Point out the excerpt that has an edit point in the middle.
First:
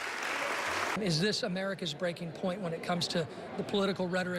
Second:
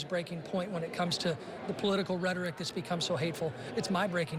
first; 1 cut; at 1.0 s

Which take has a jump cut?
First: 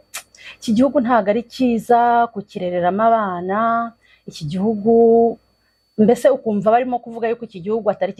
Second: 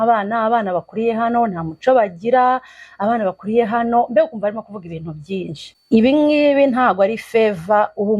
second; 1 cut; at 5.7 s

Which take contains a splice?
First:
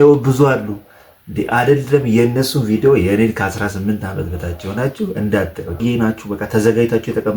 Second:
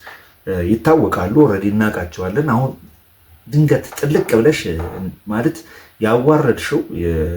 first; 1 cut; at 5.8 s

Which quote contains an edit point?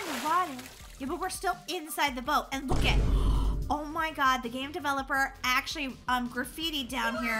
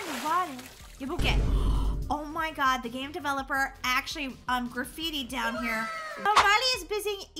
second; 2 cuts; at 1.2 s, 6.3 s

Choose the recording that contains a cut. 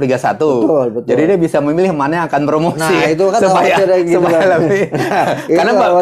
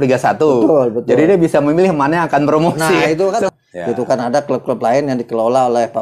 second; 1 cut; at 3.4 s

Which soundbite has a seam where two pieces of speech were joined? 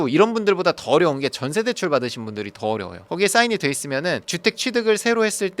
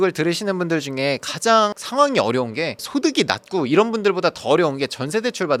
first; 1 cut; at 2.9 s

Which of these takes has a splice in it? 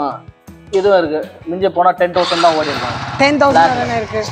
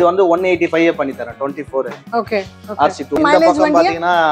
second; 1 cut; at 3.2 s

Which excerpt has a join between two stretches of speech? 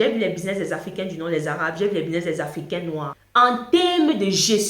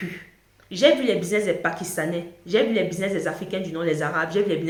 first; 1 cut; at 3.2 s

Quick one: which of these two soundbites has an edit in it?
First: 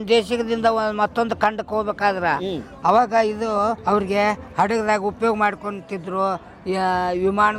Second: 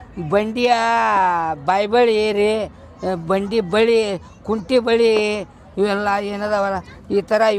first; 1 cut; at 3.8 s

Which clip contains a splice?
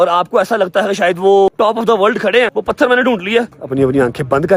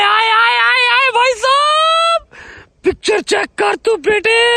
first; 3 cuts; at 1.5 s, 2.5 s, 3.6 s

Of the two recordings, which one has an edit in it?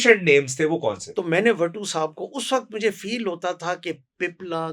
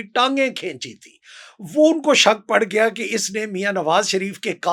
first; 1 cut; at 1.1 s

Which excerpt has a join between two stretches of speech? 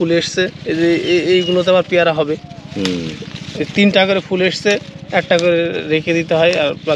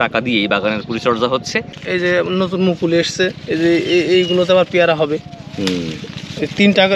second; 1 cut; at 1.8 s

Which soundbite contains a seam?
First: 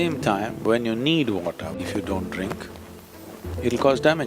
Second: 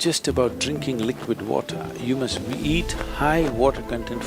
first; 1 cut; at 1.8 s

